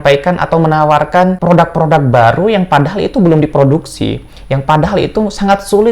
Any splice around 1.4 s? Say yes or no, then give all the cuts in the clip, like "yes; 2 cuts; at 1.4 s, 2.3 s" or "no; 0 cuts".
yes; 1 cut; at 1.4 s